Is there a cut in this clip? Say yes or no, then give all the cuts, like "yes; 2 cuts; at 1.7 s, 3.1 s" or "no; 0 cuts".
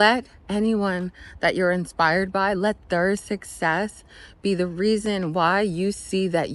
no; 0 cuts